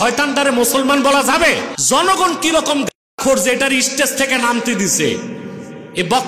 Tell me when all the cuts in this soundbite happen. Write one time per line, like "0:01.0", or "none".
0:01.7